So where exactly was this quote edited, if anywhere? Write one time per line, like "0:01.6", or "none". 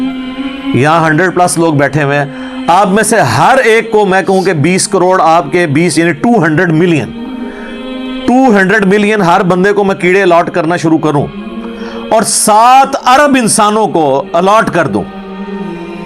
0:15.1